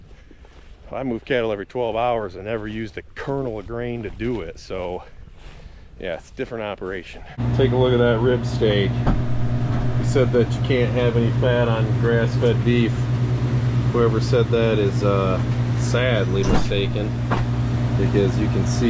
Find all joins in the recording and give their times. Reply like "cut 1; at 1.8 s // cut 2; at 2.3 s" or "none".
cut 1; at 7.4 s